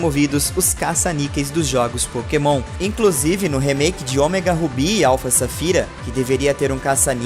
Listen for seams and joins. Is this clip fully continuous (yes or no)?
no